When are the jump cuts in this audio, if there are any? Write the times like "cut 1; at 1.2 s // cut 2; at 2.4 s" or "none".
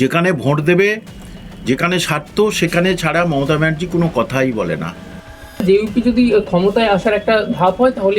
cut 1; at 5.6 s

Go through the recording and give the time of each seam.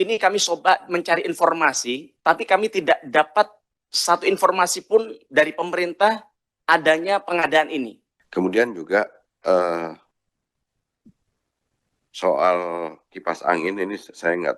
cut 1; at 8.1 s

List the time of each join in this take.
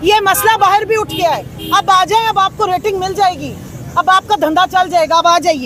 none

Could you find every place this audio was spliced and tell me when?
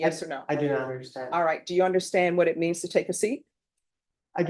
none

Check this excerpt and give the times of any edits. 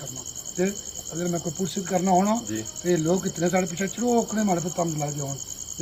none

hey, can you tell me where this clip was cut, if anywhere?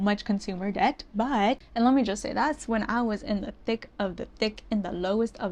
cut 1; at 1.6 s

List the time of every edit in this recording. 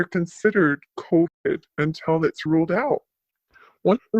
cut 1; at 0.9 s

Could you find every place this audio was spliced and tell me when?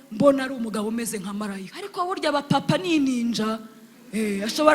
cut 1; at 1.8 s

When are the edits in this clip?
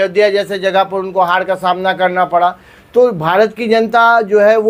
none

